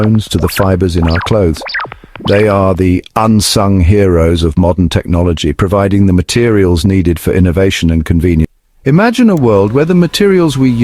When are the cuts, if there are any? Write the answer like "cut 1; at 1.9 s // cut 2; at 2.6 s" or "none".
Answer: cut 1; at 8.5 s